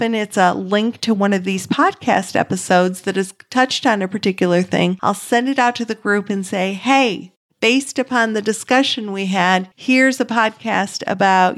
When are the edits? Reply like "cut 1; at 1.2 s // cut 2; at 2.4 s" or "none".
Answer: cut 1; at 5.0 s // cut 2; at 9.7 s